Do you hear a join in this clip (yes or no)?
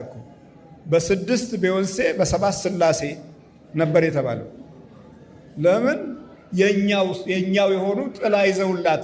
no